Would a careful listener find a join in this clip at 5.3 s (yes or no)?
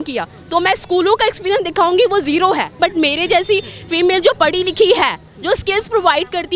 no